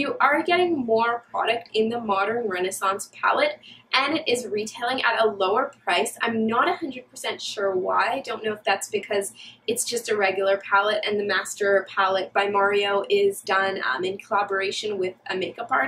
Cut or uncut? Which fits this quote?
uncut